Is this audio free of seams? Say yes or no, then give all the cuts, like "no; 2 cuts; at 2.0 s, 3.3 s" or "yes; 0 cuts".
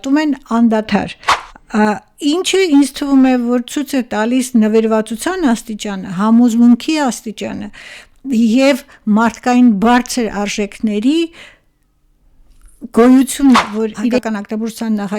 no; 1 cut; at 14.2 s